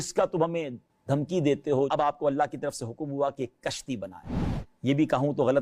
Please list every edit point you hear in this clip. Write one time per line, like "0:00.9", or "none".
0:01.9